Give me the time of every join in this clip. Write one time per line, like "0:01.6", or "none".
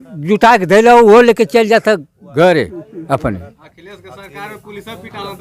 none